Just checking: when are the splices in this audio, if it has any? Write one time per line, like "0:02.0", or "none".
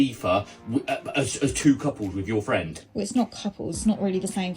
0:02.5

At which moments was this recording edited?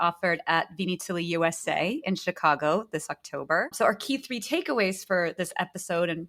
none

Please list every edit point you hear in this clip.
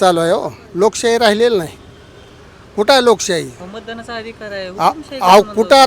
none

